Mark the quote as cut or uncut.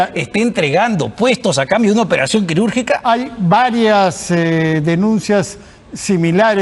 uncut